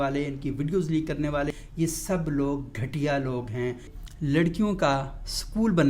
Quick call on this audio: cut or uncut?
cut